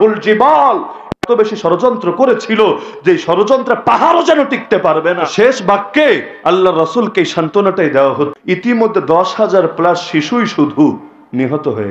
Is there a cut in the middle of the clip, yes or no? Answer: yes